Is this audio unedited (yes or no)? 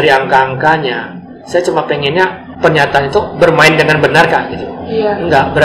no